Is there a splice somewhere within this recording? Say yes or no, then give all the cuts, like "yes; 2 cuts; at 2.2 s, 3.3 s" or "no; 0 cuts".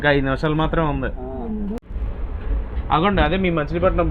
yes; 1 cut; at 2.0 s